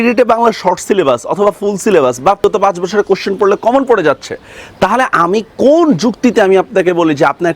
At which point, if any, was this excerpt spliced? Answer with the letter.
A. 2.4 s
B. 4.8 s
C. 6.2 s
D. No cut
A